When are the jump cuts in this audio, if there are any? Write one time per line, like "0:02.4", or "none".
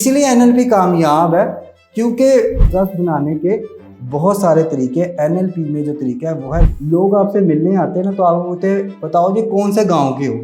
0:02.7
0:06.7